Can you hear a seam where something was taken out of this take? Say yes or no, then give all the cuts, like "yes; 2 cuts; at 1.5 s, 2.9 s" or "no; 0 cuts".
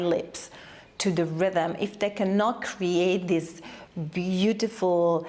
no; 0 cuts